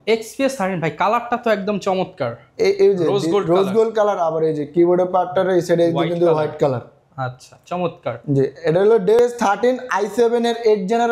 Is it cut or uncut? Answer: uncut